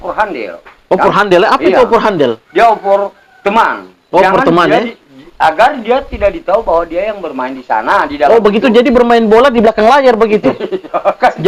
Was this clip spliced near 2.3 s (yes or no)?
no